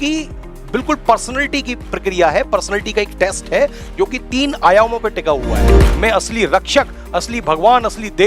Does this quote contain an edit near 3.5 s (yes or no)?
no